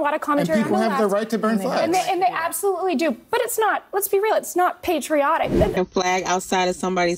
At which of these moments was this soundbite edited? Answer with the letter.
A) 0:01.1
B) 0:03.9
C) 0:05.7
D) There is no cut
C